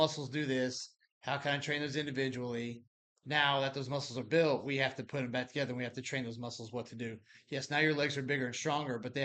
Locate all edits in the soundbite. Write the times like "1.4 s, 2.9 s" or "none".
none